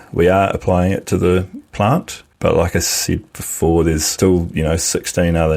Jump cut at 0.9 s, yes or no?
no